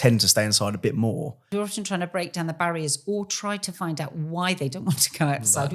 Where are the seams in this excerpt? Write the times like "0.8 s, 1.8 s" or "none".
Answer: 1.5 s